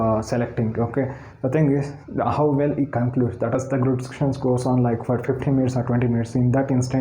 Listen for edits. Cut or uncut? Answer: cut